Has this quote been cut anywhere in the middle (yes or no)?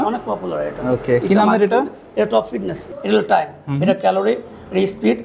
yes